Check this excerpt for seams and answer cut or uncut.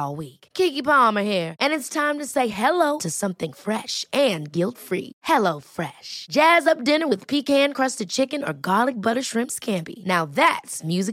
uncut